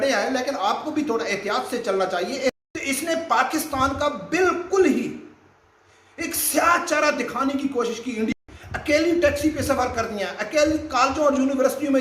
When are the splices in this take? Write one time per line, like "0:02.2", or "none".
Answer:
0:02.4
0:08.4